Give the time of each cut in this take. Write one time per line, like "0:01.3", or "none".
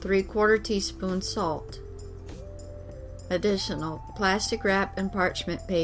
0:01.6
0:03.3